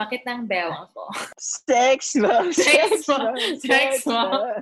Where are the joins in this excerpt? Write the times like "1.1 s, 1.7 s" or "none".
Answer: 1.4 s